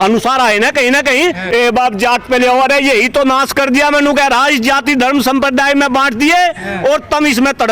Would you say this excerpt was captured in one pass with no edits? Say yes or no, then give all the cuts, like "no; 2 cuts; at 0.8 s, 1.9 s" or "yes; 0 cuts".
no; 1 cut; at 1.4 s